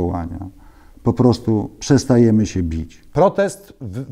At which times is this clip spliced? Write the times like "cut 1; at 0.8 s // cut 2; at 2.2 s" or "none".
cut 1; at 3.0 s